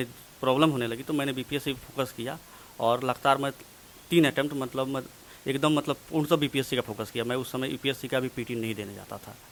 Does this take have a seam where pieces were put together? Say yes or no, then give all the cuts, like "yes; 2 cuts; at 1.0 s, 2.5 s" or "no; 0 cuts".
no; 0 cuts